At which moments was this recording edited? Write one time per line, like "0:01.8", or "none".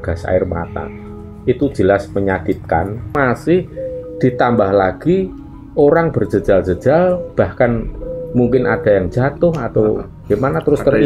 0:03.1